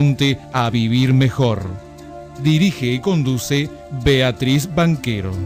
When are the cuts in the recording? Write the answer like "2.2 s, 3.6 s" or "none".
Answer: none